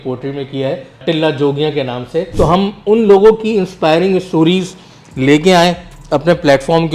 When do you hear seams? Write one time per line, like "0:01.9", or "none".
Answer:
0:01.0
0:02.3